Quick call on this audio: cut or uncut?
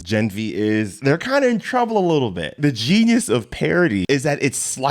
cut